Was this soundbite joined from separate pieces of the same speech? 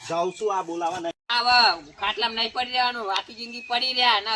yes; 1 cut; at 1.2 s

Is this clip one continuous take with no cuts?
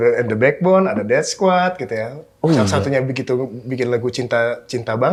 yes; 0 cuts

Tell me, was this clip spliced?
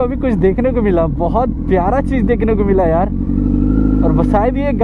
no; 0 cuts

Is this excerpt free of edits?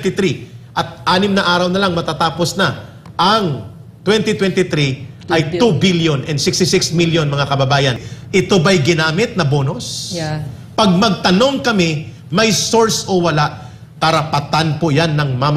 no; 1 cut; at 8.1 s

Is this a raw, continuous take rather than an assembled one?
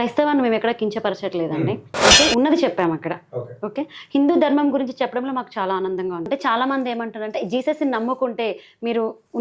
no; 1 cut; at 6.3 s

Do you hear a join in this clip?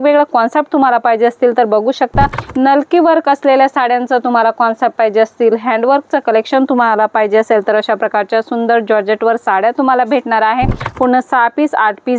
yes; 2 cuts; at 2.4 s, 10.8 s

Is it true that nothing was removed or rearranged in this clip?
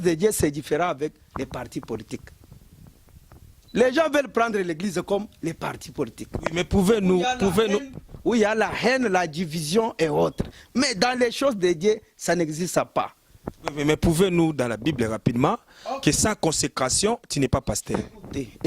yes; 0 cuts

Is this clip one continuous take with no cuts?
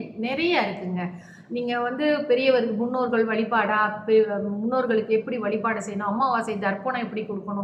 yes; 0 cuts

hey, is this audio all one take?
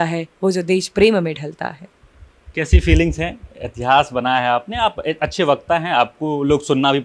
yes; 0 cuts

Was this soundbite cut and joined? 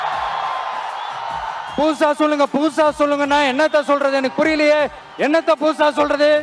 yes; 1 cut; at 1.7 s

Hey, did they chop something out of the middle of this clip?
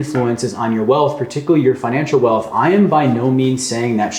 no; 0 cuts

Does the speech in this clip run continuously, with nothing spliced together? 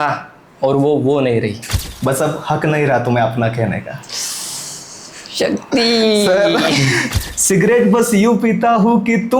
no; 2 cuts; at 1.6 s, 7.1 s

